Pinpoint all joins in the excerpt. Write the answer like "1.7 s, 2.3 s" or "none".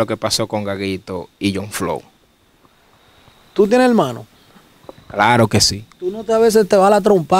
none

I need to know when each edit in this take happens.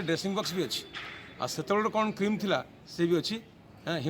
none

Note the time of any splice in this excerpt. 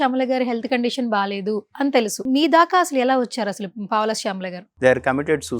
2.2 s, 4.6 s

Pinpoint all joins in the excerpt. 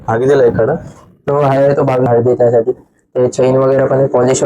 2.1 s

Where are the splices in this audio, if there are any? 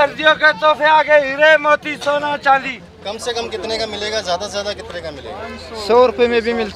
2.9 s

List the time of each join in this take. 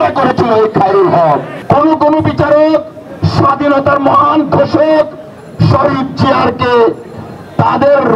1.5 s

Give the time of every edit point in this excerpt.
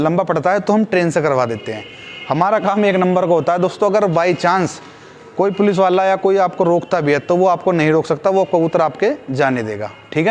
none

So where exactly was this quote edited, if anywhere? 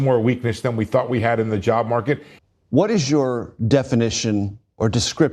2.3 s

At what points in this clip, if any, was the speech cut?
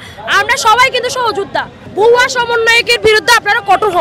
1.8 s

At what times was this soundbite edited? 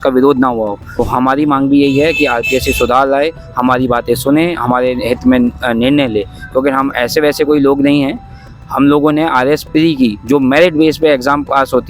0.9 s

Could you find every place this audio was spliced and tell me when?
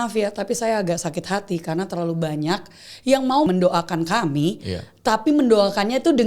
3.5 s

